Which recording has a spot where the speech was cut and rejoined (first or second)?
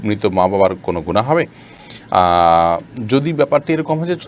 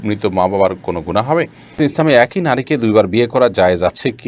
second